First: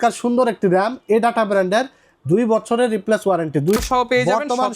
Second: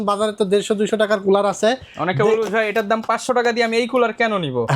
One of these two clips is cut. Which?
first; 1 cut; at 3.8 s

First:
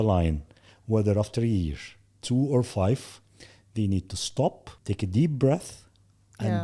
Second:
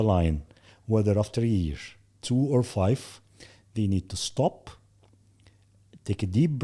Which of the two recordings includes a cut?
first; 1 cut; at 4.7 s

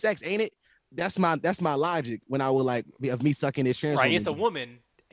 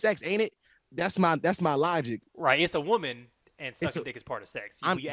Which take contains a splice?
second; 1 cut; at 2.3 s

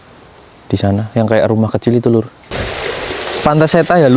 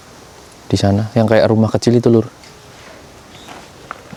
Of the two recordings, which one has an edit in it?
first; 1 cut; at 2.5 s

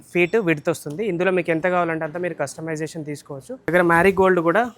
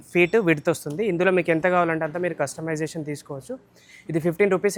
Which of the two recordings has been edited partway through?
first; 1 cut; at 3.7 s

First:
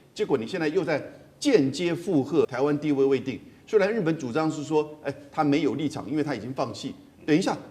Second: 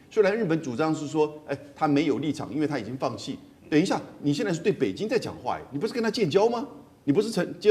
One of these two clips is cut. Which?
first; 1 cut; at 2.5 s

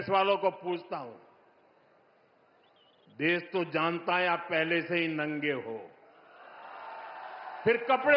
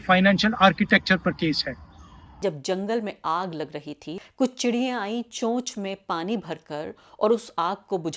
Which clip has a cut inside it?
second; 2 cuts; at 2.4 s, 4.1 s

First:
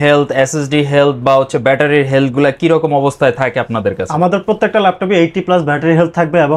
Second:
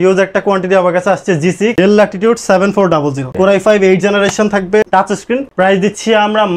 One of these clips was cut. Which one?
second; 2 cuts; at 1.7 s, 4.9 s

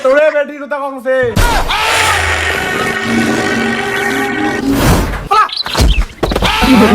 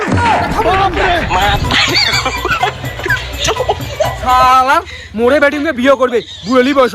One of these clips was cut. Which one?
first; 1 cut; at 4.6 s

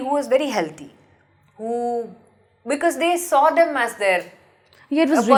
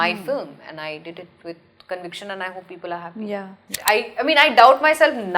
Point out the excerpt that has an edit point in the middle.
second; 1 cut; at 3.7 s

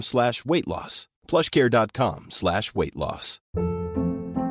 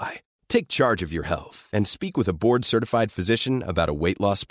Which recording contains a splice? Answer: first; 1 cut; at 3.3 s

